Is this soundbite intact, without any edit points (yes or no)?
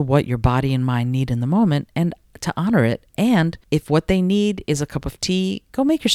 no